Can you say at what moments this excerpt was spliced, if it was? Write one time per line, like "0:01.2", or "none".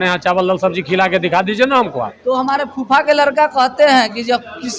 0:02.1